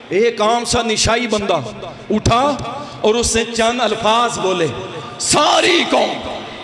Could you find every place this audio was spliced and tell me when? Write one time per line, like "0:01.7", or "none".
none